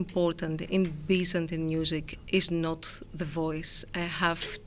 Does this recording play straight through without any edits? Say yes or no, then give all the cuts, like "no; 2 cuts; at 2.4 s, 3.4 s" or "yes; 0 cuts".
yes; 0 cuts